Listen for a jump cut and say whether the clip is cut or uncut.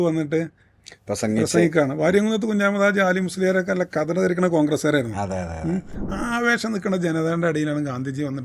cut